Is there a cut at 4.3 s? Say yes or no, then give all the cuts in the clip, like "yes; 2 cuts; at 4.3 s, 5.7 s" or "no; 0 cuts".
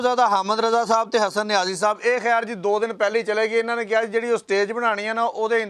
no; 0 cuts